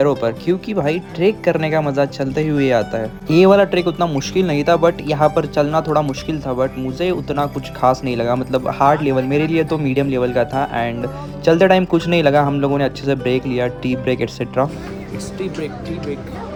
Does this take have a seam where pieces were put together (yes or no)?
no